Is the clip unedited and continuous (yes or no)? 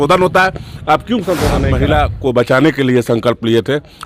no